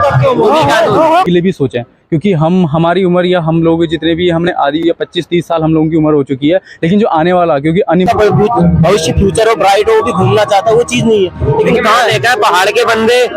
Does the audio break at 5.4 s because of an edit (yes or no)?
no